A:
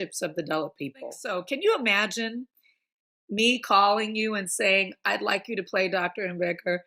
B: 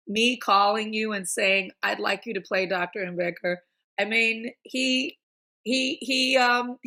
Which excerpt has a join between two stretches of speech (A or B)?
A